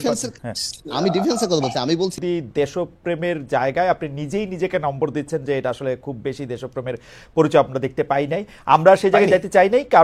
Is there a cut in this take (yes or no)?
yes